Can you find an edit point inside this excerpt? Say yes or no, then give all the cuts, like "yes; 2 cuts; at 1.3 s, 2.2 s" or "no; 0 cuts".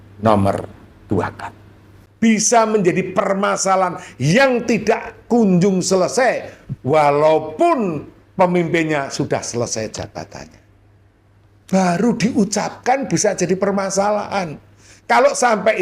yes; 1 cut; at 1.7 s